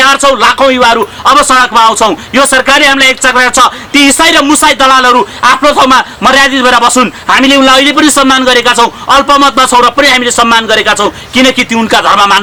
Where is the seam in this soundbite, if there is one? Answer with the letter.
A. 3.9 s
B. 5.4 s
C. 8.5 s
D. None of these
D